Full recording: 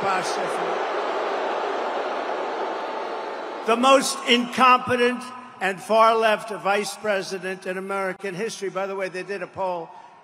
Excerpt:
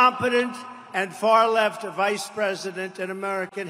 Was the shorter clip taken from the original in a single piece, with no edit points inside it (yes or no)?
yes